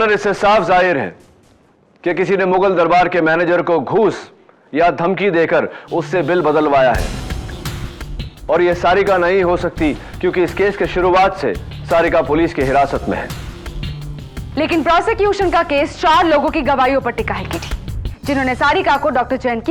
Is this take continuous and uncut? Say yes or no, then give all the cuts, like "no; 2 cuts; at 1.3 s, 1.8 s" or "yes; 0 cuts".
yes; 0 cuts